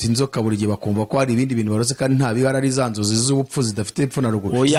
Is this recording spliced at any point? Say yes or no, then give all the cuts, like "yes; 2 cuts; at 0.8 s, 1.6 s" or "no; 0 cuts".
no; 0 cuts